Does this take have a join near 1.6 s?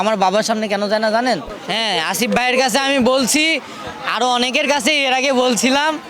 yes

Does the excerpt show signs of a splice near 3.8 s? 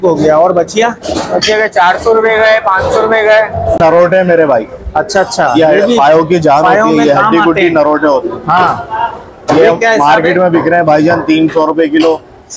yes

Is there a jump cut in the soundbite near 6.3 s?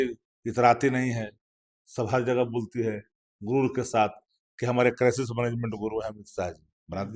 no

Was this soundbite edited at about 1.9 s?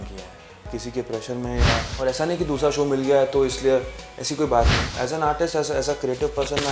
yes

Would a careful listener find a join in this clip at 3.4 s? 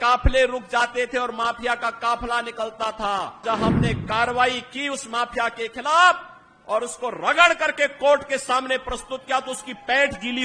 yes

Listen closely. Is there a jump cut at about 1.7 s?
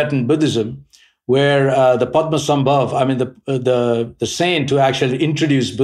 no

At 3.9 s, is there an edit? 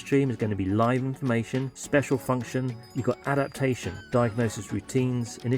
yes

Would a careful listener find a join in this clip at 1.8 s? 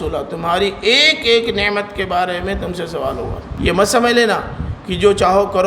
no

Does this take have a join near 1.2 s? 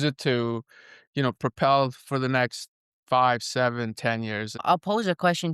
no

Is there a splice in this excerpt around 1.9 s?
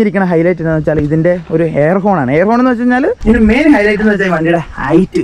no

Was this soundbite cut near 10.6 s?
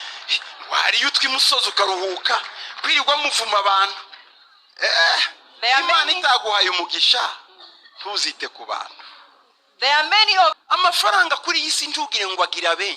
yes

